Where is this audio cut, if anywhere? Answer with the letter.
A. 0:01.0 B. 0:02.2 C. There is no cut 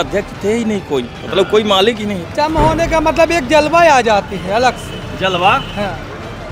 B